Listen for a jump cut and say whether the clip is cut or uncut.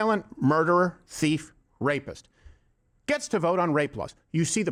uncut